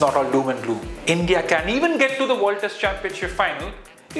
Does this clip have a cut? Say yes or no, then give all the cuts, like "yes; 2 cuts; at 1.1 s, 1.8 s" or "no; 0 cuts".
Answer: yes; 1 cut; at 0.9 s